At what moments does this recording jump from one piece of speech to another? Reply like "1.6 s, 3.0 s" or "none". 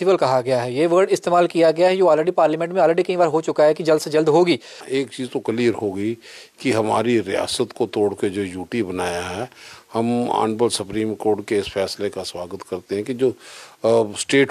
4.8 s